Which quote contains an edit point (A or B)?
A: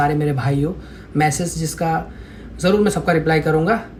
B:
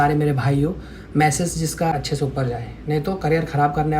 B